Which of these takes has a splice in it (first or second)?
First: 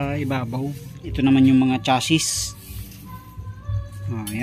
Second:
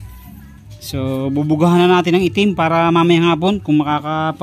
first